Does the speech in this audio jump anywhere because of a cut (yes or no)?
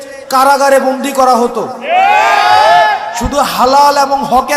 no